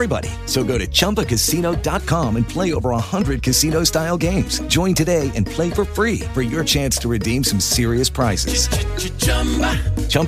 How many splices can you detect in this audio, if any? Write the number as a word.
zero